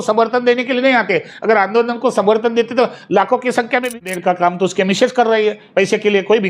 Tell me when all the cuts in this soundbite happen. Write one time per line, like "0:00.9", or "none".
0:03.9